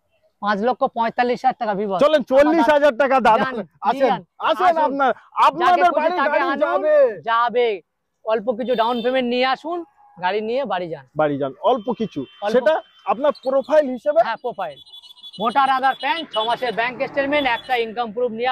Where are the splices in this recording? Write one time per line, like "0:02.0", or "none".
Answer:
none